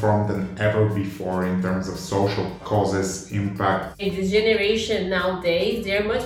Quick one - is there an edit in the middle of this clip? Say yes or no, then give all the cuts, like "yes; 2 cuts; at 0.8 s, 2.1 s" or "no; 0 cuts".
yes; 2 cuts; at 2.6 s, 4.0 s